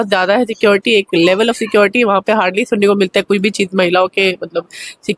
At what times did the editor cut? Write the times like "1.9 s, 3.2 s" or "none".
none